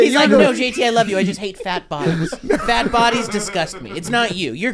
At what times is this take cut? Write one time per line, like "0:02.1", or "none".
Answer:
none

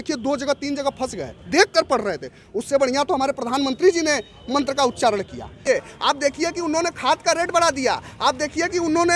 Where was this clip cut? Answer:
0:05.6

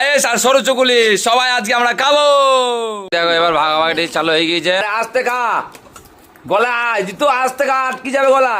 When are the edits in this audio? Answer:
0:04.8

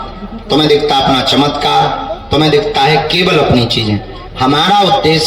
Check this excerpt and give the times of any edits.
none

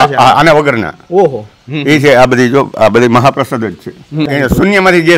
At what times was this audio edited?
0:04.3

